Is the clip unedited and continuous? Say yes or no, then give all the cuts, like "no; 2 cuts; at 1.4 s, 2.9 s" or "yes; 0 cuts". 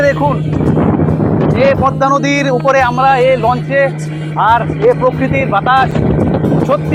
yes; 0 cuts